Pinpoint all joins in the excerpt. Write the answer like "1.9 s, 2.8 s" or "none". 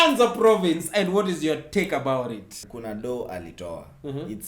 2.7 s